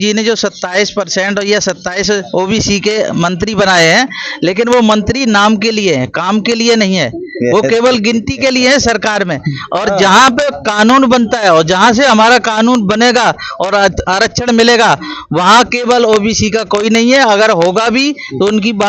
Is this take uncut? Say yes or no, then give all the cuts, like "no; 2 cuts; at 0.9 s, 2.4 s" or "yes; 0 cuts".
yes; 0 cuts